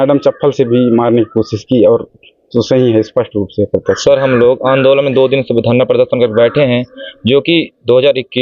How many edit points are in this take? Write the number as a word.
one